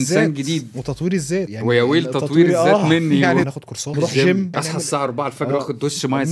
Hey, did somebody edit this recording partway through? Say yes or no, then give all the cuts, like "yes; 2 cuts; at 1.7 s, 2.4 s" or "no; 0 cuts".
yes; 3 cuts; at 1.5 s, 3.5 s, 4.5 s